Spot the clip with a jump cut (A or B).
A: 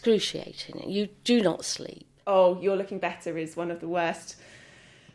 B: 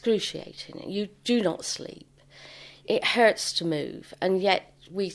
A